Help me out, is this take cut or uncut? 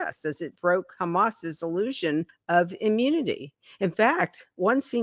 cut